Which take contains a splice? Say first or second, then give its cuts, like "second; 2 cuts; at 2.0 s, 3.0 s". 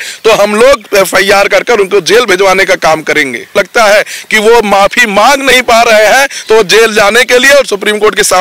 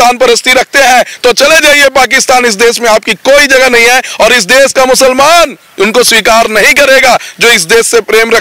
first; 1 cut; at 3.5 s